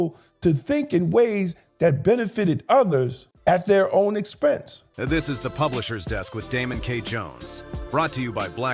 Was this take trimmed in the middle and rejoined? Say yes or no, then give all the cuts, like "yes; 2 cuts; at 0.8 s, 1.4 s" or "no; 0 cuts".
yes; 2 cuts; at 3.2 s, 4.8 s